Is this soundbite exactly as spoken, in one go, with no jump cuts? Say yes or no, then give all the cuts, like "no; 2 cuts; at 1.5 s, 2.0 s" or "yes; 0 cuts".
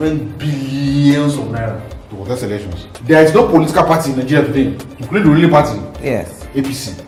yes; 0 cuts